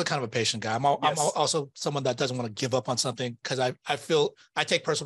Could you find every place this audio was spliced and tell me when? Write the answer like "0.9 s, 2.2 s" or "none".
none